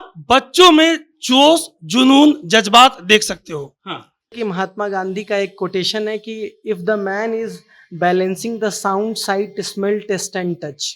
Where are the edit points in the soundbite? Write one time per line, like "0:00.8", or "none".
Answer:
0:04.3